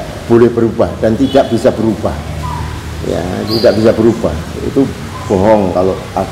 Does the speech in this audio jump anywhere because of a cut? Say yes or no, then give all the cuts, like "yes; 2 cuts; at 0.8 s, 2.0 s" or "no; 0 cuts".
no; 0 cuts